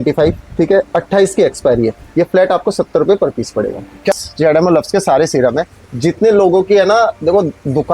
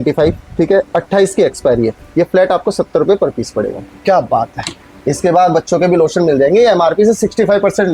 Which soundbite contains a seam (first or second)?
first